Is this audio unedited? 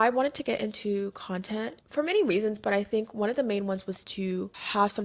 yes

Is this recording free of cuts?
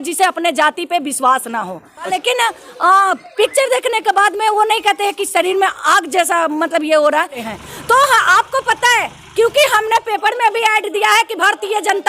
no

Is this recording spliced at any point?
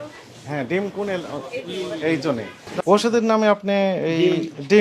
yes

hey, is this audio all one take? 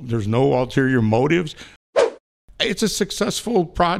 no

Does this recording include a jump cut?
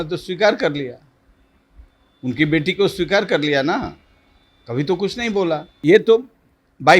yes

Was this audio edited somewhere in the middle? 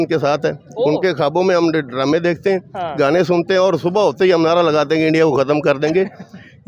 no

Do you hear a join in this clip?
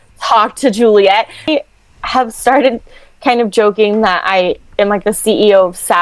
yes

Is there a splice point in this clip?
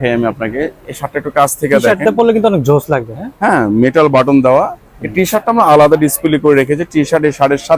no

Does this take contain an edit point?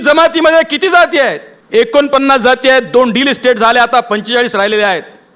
yes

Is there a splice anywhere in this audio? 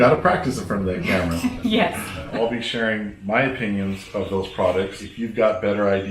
yes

